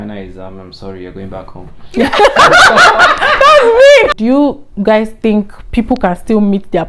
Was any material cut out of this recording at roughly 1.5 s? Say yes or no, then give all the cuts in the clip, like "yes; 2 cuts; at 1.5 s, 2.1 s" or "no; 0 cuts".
no; 1 cut; at 4.1 s